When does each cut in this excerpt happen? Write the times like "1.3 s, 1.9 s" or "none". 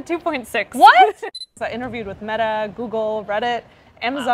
1.2 s